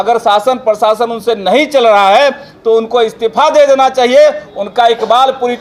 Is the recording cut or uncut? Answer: uncut